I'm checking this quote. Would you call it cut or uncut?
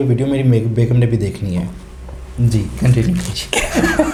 uncut